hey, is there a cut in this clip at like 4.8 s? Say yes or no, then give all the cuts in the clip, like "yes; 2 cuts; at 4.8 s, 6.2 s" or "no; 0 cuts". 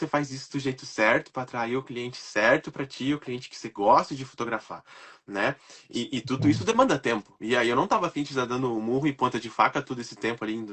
no; 0 cuts